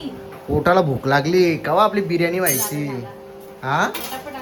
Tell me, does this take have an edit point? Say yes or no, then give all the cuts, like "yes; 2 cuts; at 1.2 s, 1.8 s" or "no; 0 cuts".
no; 0 cuts